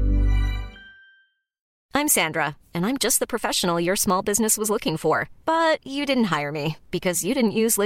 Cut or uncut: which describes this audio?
cut